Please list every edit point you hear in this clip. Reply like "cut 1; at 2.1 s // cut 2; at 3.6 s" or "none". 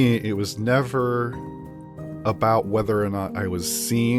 none